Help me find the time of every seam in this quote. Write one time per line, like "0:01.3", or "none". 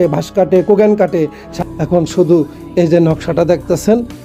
0:01.5